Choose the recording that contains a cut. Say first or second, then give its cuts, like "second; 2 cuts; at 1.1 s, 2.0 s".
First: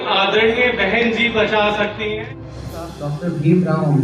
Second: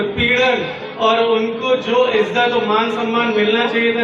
first; 1 cut; at 2.8 s